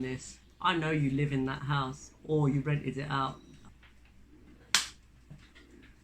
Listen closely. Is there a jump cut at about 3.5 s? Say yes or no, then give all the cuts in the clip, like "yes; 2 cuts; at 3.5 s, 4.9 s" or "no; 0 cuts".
yes; 1 cut; at 3.5 s